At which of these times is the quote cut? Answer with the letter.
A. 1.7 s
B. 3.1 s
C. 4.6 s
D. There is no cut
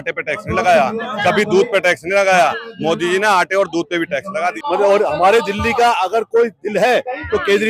C